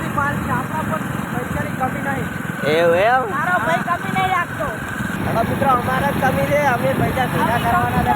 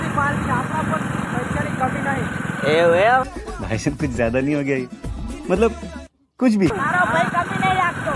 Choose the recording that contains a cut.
first; 2 cuts; at 3.3 s, 5.2 s

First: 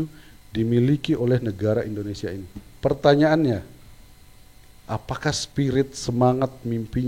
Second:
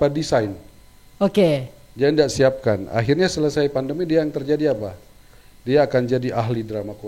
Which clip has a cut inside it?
first; 1 cut; at 2.6 s

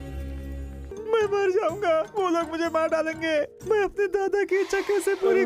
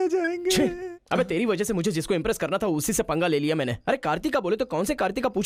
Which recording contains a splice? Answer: first; 1 cut; at 1.0 s

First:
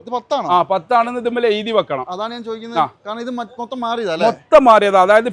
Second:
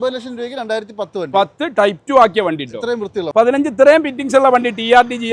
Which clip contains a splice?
second; 1 cut; at 3.3 s

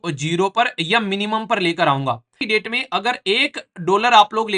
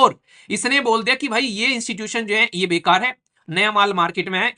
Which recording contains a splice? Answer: first; 1 cut; at 2.4 s

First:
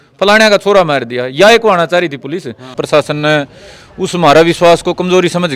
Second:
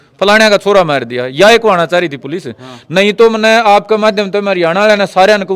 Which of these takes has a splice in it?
first; 1 cut; at 2.8 s

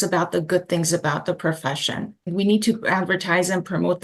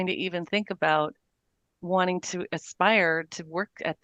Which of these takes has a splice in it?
first; 1 cut; at 2.3 s

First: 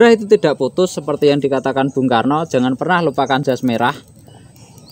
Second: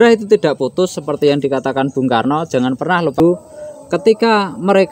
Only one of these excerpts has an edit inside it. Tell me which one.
second; 1 cut; at 3.2 s

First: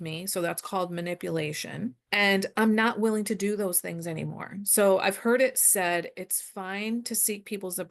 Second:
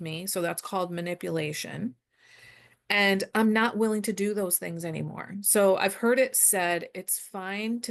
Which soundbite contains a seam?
first; 1 cut; at 2.0 s

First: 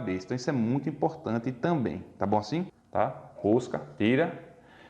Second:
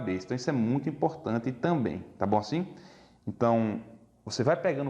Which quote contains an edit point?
first; 1 cut; at 2.8 s

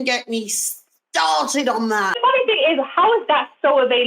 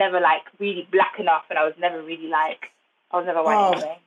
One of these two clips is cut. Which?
first; 1 cut; at 2.2 s

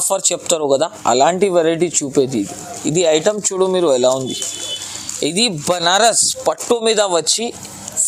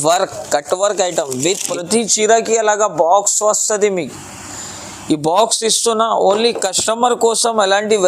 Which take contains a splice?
second; 1 cut; at 1.7 s

